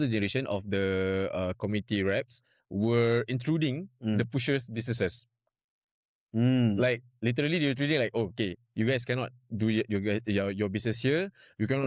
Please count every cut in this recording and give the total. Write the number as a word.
zero